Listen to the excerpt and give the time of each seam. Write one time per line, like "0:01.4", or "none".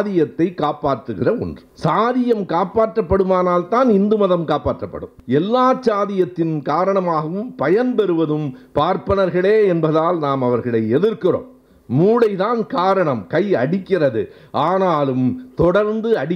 0:01.6
0:05.1